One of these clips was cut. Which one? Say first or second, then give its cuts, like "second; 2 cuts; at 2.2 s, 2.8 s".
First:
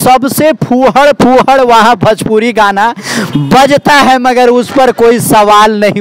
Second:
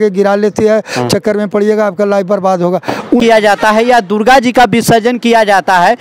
second; 1 cut; at 3.2 s